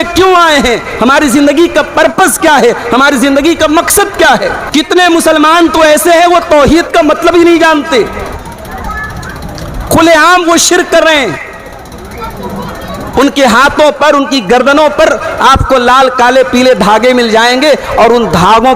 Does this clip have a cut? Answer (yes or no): yes